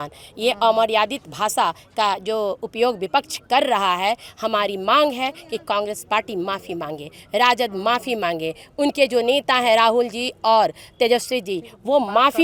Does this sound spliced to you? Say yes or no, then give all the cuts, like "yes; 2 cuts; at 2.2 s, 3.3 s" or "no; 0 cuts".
no; 0 cuts